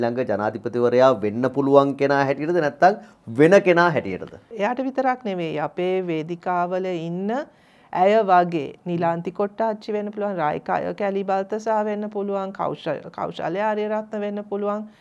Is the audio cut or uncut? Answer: cut